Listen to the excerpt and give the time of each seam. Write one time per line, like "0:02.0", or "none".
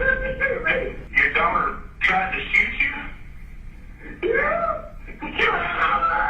0:01.1